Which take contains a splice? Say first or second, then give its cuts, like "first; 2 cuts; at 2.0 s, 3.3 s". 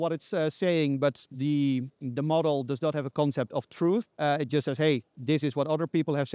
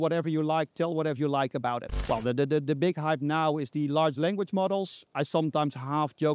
second; 1 cut; at 1.9 s